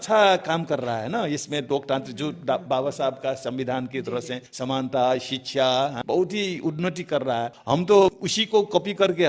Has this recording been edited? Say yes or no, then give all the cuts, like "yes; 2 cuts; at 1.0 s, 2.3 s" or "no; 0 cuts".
yes; 4 cuts; at 4.4 s, 6.0 s, 7.6 s, 8.3 s